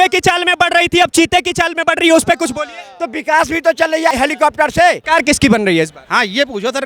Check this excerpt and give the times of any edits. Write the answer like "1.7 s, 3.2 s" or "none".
4.1 s, 5.0 s